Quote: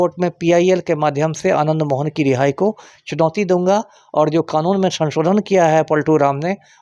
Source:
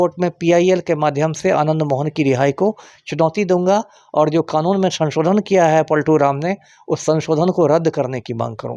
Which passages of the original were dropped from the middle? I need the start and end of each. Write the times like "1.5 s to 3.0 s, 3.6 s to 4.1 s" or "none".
none